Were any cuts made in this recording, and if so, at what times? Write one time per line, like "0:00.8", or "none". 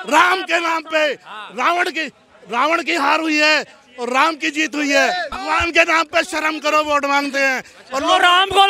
0:05.3